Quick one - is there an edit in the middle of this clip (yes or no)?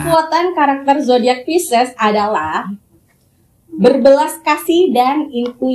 no